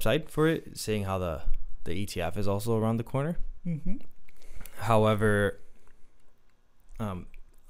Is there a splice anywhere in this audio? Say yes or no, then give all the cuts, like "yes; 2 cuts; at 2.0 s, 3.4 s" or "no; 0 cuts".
no; 0 cuts